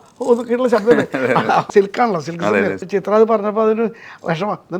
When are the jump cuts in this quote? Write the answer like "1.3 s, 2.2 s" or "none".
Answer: 1.7 s, 2.8 s